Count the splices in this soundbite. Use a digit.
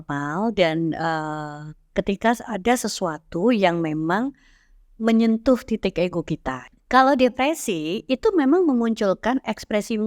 1